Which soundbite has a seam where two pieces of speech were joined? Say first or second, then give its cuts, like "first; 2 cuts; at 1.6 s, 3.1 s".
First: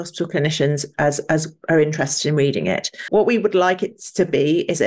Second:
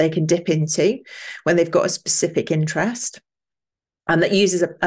first; 1 cut; at 3.1 s